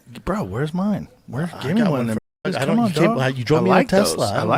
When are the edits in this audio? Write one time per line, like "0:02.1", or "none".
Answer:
none